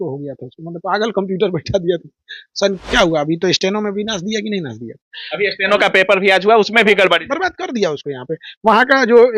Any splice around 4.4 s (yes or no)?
no